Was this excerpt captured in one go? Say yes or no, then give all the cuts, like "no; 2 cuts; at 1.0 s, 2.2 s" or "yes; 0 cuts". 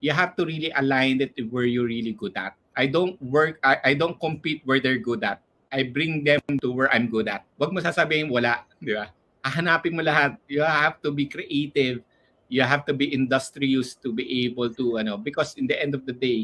no; 2 cuts; at 2.6 s, 7.4 s